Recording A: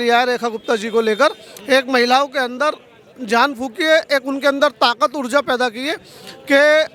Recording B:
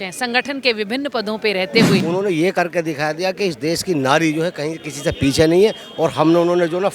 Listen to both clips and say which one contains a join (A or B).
B